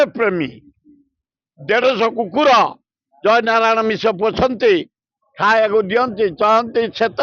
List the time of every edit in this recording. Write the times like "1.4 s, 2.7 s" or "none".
none